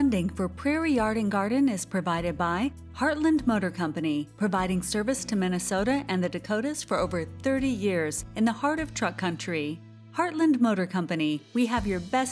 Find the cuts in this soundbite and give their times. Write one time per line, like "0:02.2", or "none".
none